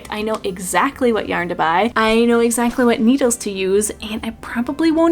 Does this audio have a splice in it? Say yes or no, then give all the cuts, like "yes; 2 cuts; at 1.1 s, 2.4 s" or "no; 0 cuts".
no; 0 cuts